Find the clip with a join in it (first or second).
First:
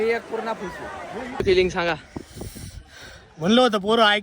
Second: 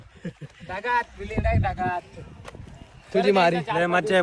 first